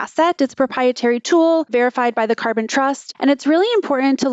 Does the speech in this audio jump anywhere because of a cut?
yes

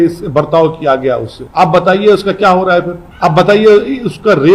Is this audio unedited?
no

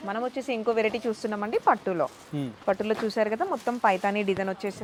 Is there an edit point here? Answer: no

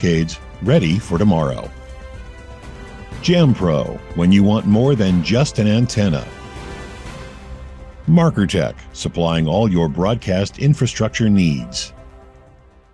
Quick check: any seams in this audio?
yes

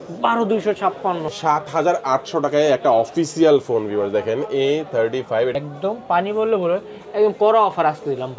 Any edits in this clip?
yes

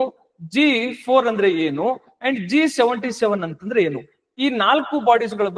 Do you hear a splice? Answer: no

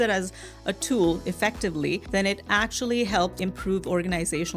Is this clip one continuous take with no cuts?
no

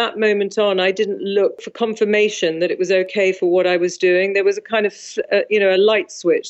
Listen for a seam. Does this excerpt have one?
yes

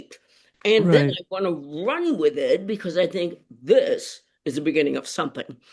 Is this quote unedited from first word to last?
yes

